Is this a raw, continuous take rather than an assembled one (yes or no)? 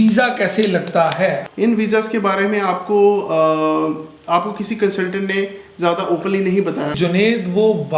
no